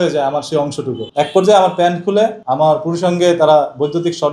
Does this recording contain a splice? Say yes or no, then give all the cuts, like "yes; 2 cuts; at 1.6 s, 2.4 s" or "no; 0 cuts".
yes; 2 cuts; at 1.0 s, 2.4 s